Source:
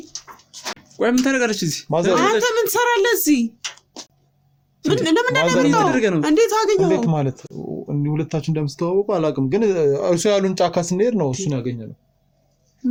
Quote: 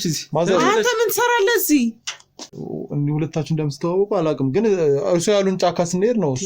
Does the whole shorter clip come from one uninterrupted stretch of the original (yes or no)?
no